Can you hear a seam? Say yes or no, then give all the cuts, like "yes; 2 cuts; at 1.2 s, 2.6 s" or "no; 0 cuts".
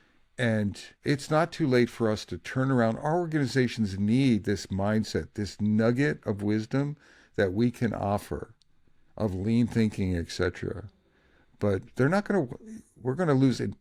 no; 0 cuts